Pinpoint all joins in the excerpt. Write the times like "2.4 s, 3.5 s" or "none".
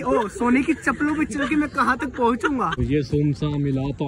2.8 s